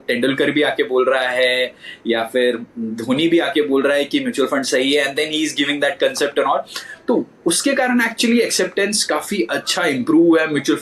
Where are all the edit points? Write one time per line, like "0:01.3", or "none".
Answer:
none